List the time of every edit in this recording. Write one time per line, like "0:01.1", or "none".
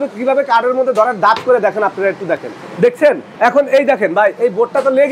0:02.6
0:03.3